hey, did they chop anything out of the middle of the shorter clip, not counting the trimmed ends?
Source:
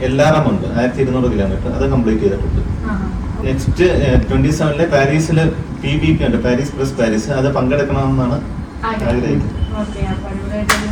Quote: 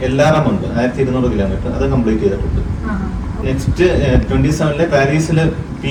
no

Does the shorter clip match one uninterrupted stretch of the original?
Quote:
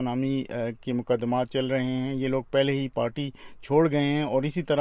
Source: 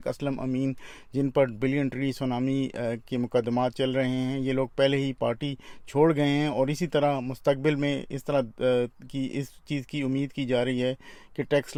yes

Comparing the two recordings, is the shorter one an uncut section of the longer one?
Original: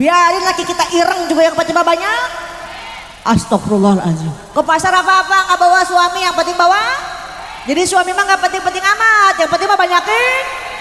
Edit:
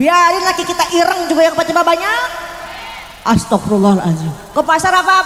yes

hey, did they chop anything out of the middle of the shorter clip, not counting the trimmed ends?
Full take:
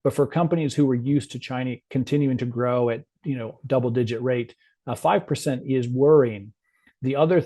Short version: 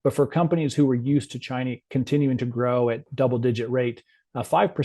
yes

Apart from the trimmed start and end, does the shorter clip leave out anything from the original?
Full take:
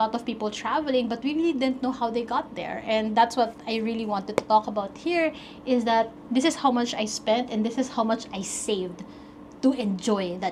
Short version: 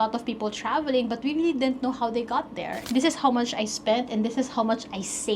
yes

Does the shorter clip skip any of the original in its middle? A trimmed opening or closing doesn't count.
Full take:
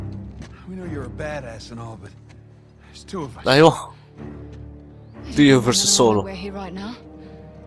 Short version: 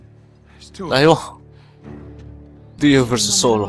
yes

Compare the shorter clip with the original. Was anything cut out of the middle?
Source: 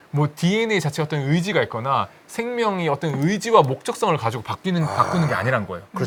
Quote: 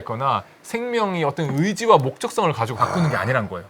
yes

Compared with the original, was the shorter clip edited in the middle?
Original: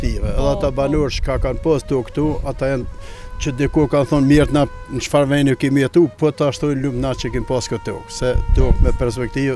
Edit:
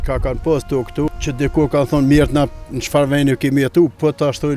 yes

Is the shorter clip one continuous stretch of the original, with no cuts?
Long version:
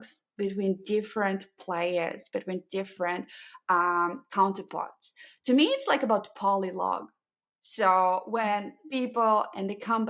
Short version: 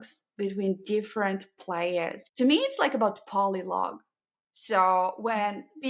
no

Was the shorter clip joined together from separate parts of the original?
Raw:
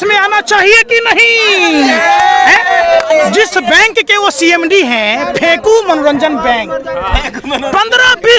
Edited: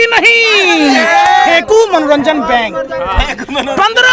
yes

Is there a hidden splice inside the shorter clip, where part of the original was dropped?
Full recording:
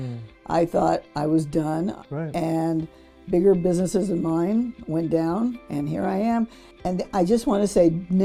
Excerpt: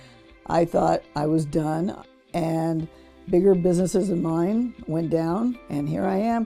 no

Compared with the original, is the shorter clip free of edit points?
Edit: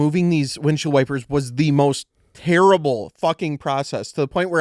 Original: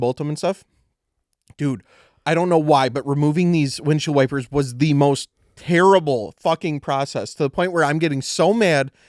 yes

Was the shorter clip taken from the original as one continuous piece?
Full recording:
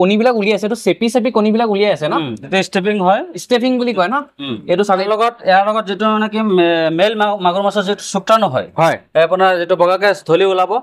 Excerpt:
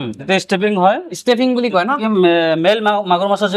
no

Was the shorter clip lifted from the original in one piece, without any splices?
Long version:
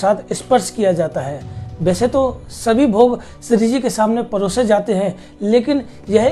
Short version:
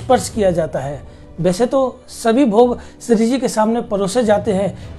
yes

